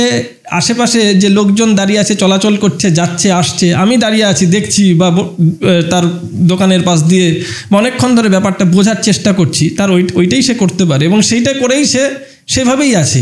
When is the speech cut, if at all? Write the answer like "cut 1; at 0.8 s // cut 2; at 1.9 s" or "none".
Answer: none